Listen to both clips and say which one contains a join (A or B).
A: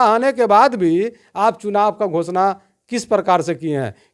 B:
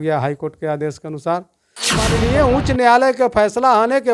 B